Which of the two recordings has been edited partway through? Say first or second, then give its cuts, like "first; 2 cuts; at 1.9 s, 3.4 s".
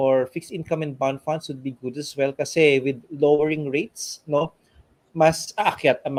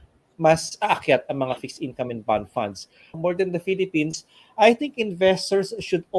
second; 1 cut; at 3.1 s